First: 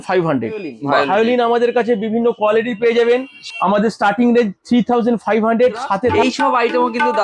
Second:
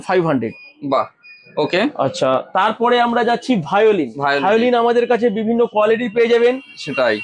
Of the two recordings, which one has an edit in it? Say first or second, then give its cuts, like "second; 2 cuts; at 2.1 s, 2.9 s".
first; 3 cuts; at 0.9 s, 3.5 s, 6.1 s